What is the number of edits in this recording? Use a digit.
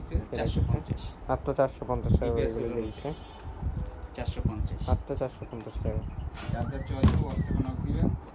0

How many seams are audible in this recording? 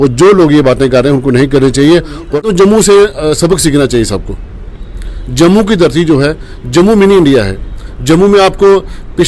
1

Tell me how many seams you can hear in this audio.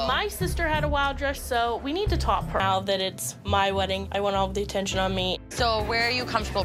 0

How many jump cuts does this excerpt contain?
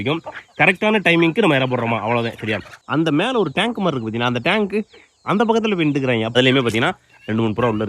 2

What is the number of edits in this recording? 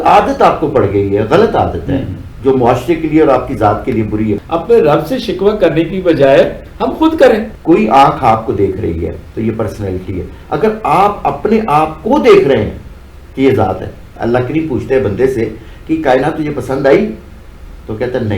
3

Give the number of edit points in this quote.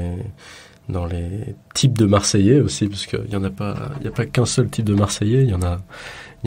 0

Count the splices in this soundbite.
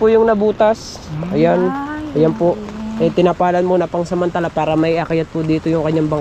0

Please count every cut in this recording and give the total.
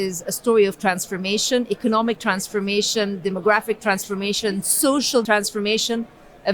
1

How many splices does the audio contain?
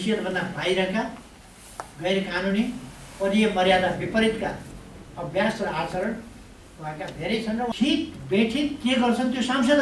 1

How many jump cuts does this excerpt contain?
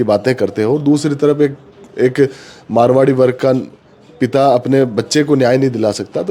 0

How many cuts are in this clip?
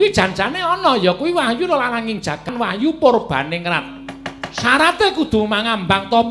1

